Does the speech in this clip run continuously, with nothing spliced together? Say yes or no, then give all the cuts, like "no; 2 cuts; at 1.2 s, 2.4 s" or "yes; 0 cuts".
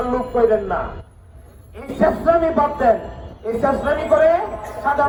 yes; 0 cuts